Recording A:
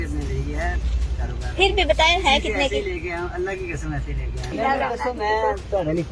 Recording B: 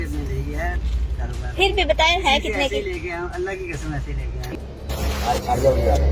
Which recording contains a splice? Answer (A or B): B